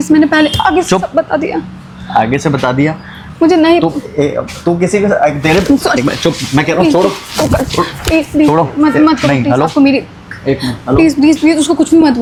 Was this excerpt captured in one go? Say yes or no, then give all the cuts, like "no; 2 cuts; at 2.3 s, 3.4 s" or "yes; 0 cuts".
yes; 0 cuts